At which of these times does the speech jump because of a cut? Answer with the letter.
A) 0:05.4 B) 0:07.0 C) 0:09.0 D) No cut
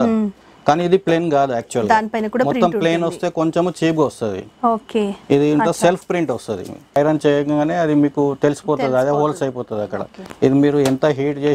B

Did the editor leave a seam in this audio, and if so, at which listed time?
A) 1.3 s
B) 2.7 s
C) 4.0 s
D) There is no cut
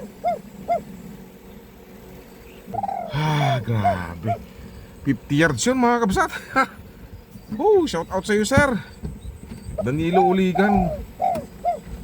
B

